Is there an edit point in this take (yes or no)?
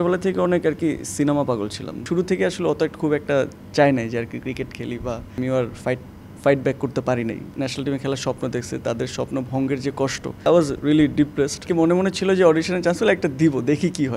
yes